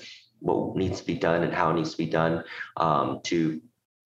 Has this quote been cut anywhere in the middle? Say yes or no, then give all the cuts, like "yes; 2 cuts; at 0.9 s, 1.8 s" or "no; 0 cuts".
no; 0 cuts